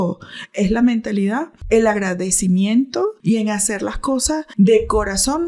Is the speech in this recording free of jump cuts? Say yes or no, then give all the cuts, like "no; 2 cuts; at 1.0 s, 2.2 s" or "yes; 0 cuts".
no; 3 cuts; at 1.6 s, 3.2 s, 4.5 s